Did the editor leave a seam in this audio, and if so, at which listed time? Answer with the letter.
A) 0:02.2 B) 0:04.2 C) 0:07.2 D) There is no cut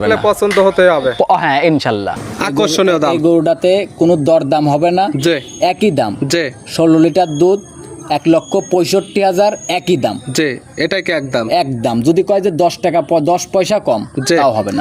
A